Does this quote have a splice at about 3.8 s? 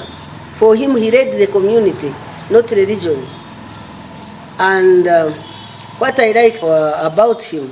no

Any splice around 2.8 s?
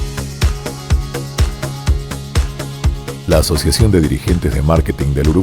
yes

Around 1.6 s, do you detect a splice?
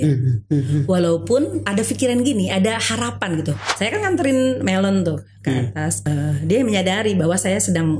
yes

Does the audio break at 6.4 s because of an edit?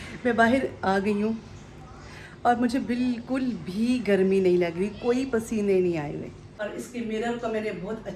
yes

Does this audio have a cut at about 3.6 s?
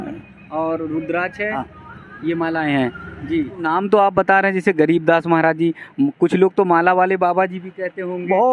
yes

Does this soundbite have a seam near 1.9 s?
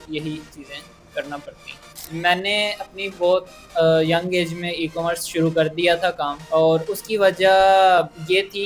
yes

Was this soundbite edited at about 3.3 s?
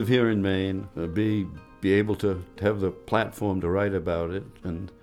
no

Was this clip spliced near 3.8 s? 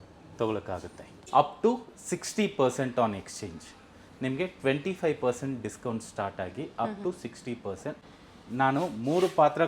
no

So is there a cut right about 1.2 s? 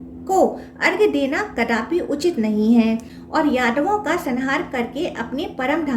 no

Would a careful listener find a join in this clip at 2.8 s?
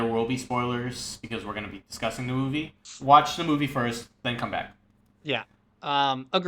yes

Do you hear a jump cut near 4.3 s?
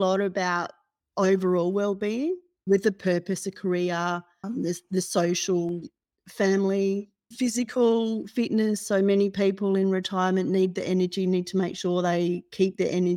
yes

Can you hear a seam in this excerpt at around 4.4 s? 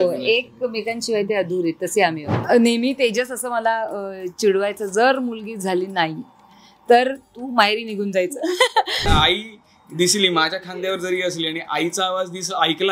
no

